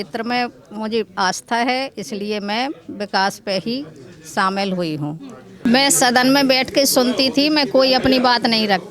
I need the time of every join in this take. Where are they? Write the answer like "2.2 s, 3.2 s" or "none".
5.5 s